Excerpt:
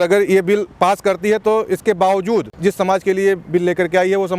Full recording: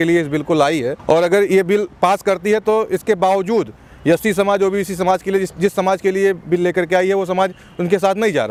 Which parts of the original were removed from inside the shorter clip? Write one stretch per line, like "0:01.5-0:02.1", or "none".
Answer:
0:03.7-0:05.5